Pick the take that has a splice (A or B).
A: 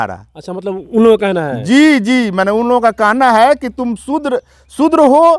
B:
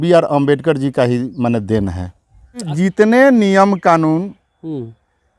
B